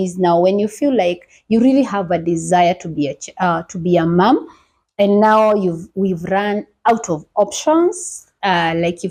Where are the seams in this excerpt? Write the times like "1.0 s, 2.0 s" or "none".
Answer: none